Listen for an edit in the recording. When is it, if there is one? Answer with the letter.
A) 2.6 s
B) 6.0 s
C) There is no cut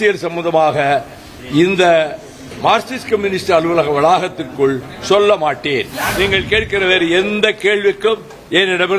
B